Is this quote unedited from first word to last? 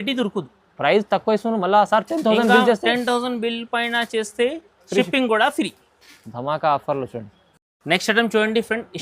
yes; 0 cuts

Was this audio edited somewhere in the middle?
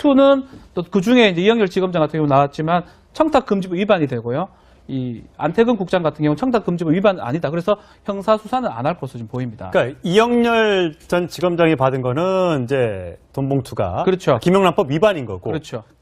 yes; 1 cut; at 10.8 s

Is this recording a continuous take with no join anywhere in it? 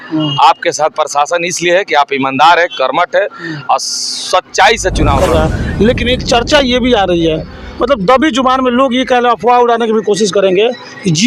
no; 1 cut; at 5.2 s

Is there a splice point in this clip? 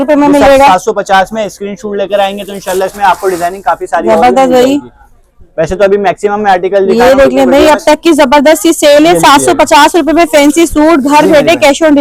no; 0 cuts

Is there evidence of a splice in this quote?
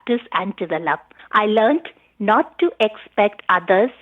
yes; 1 cut; at 1.1 s

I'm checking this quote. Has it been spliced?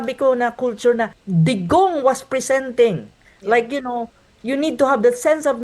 yes; 1 cut; at 1.2 s

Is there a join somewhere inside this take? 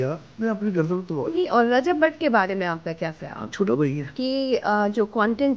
yes; 2 cuts; at 1.5 s, 4.1 s

